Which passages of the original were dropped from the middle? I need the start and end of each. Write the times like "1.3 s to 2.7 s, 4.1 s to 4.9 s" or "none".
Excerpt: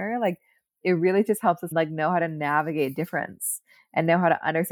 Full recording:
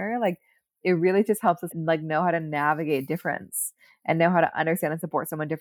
1.6 s to 1.8 s